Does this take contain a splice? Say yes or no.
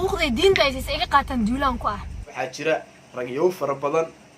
yes